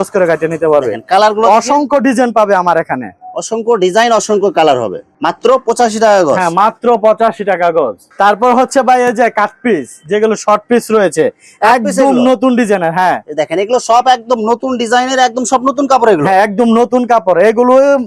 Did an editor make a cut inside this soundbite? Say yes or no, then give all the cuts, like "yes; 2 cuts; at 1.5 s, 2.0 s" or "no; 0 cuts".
no; 0 cuts